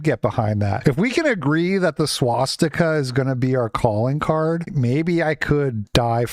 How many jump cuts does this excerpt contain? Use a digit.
1